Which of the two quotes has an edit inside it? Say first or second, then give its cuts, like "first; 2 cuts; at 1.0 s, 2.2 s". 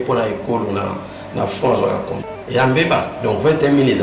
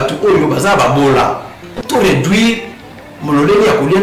first; 1 cut; at 2.3 s